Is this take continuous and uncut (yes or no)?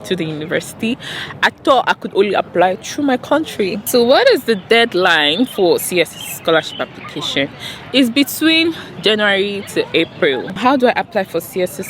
no